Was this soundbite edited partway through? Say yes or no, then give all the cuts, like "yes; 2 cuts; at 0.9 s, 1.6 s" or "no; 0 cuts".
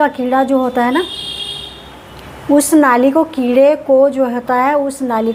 no; 0 cuts